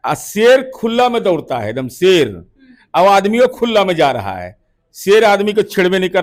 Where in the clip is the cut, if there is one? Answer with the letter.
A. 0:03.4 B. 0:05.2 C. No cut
C